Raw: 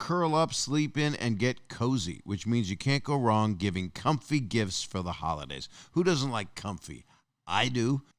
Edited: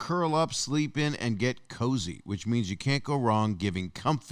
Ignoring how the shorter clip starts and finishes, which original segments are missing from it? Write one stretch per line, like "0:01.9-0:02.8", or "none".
none